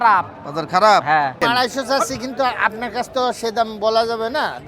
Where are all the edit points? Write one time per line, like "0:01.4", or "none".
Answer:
0:01.4